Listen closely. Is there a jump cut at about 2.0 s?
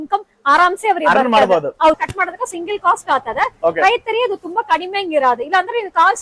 yes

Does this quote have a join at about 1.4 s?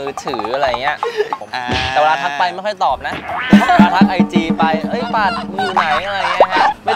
yes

